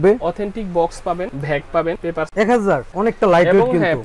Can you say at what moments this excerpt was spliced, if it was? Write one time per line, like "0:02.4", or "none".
0:02.2